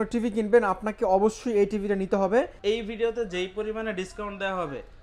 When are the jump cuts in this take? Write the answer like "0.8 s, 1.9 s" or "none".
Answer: 2.5 s